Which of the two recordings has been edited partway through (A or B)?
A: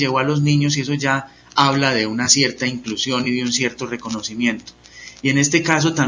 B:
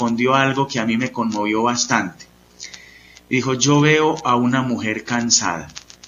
B